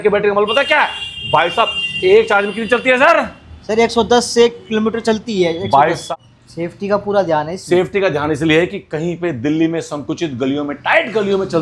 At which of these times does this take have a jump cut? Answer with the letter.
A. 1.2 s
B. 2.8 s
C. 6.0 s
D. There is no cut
C